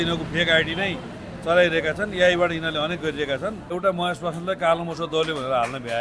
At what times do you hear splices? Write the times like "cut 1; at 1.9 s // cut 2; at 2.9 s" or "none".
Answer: cut 1; at 3.8 s